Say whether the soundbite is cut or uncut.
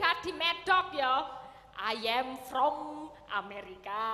uncut